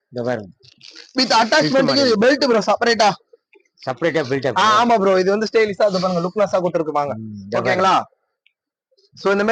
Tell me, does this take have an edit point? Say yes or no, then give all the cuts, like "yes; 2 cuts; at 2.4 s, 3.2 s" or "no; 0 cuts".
no; 0 cuts